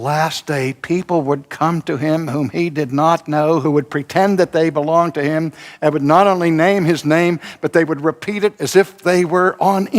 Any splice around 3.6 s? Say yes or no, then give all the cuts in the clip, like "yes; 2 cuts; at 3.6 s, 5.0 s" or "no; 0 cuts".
yes; 1 cut; at 3.6 s